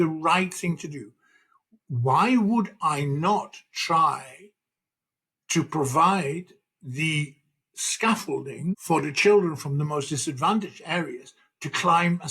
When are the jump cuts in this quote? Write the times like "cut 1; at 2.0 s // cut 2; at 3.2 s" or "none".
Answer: cut 1; at 8.8 s